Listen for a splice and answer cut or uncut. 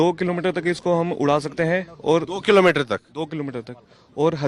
uncut